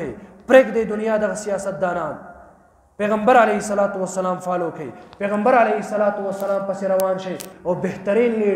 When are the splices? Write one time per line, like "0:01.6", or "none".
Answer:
0:07.5

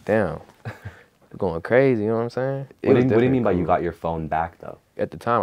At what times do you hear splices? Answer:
0:02.7

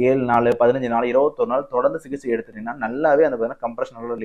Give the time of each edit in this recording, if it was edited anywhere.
none

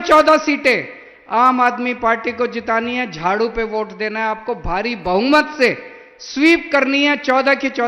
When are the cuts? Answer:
none

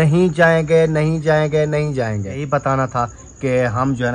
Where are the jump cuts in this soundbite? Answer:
0:02.4

